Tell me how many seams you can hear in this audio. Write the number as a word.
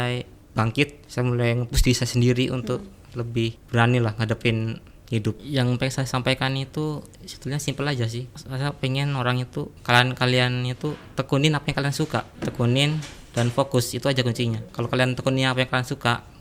five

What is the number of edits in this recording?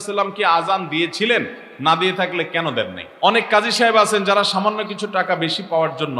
one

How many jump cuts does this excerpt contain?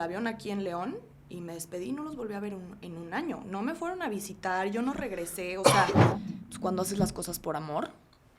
one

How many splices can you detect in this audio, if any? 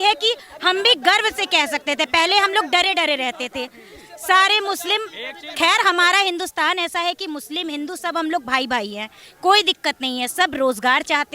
zero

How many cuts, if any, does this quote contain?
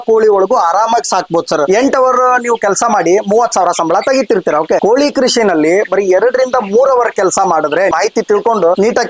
one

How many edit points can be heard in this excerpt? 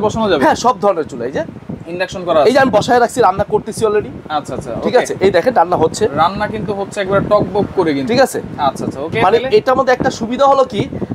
zero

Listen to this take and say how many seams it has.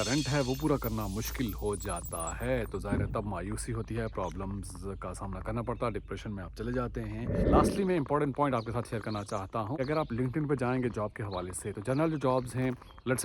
two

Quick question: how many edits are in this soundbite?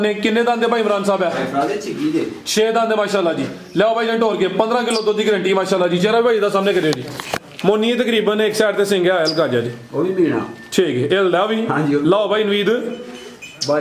zero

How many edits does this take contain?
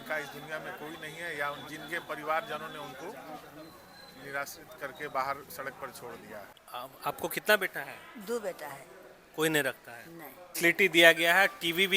two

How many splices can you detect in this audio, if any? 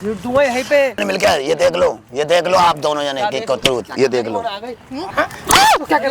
two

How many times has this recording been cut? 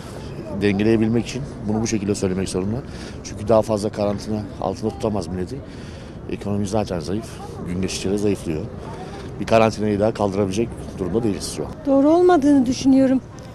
zero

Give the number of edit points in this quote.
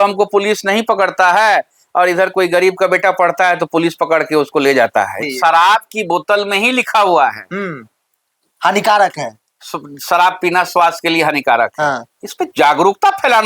one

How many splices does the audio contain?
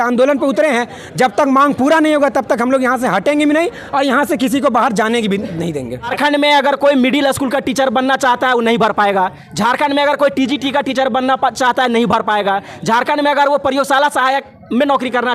one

